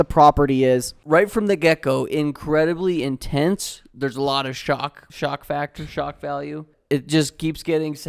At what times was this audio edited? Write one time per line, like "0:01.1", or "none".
0:00.9
0:05.0
0:06.7